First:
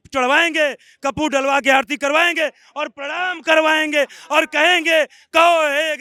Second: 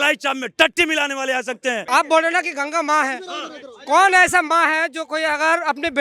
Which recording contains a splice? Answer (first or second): second